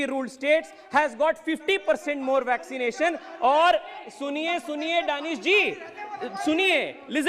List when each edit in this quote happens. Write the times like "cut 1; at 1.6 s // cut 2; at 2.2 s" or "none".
none